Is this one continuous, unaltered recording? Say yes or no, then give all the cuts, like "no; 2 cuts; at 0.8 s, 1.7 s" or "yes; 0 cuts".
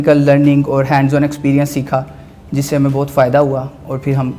yes; 0 cuts